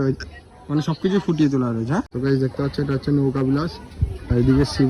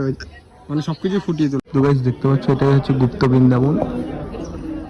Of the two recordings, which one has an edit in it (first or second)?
second